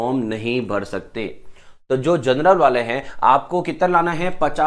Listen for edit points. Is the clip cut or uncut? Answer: uncut